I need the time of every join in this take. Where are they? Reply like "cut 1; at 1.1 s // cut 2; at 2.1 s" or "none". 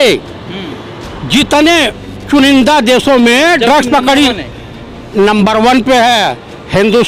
none

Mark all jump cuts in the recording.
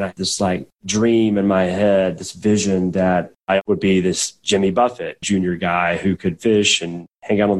cut 1; at 3.3 s

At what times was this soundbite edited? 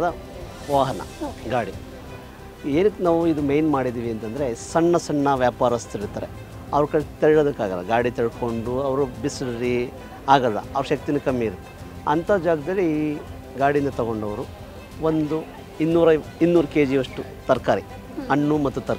none

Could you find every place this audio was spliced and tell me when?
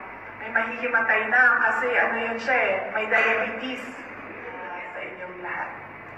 cut 1; at 4.7 s

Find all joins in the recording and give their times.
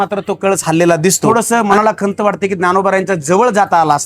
cut 1; at 1.2 s

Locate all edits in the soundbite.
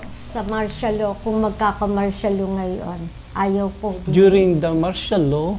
cut 1; at 4.0 s

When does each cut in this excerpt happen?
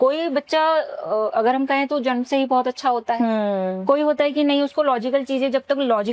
none

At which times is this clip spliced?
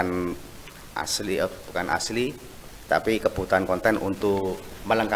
none

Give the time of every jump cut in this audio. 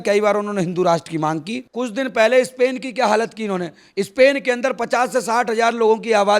cut 1; at 1.5 s

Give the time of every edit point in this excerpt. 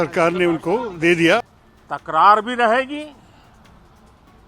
cut 1; at 1.4 s

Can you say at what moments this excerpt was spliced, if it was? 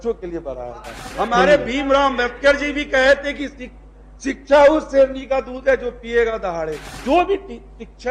cut 1; at 1.0 s // cut 2; at 6.9 s

